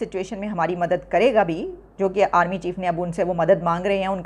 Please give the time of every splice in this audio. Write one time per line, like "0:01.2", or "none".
none